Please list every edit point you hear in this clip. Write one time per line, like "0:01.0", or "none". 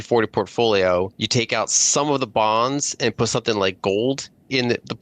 0:01.2